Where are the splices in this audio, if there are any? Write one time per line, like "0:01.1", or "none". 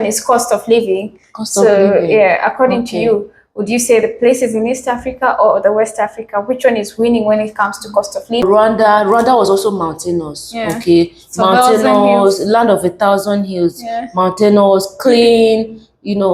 0:08.4